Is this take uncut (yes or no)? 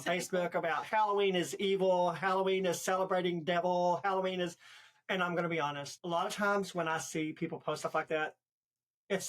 no